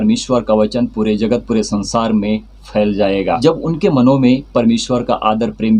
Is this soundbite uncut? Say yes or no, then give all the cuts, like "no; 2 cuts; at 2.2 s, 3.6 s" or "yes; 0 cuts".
no; 1 cut; at 3.4 s